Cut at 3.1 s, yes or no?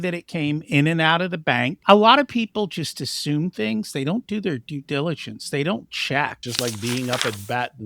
no